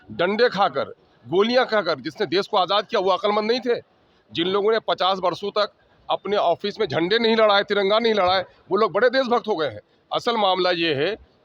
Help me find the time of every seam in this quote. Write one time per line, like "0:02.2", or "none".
none